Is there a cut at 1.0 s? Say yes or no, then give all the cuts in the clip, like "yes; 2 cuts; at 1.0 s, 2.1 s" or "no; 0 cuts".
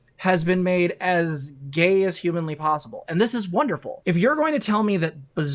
no; 1 cut; at 3.9 s